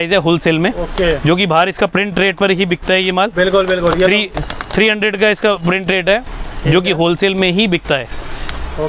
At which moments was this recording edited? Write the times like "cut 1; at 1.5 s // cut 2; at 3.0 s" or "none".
none